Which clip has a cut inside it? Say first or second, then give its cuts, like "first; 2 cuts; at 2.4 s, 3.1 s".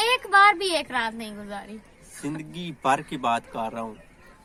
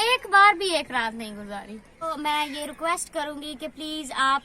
second; 1 cut; at 2.1 s